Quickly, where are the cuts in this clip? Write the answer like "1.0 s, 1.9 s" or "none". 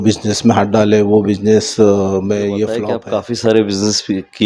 2.9 s